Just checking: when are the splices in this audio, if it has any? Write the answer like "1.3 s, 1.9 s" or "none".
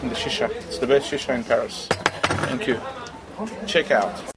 none

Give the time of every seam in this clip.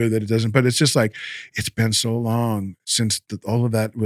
none

